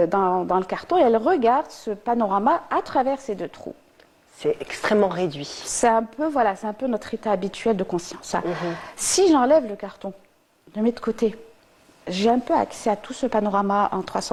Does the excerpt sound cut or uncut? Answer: uncut